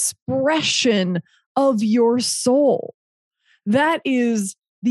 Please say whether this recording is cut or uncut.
uncut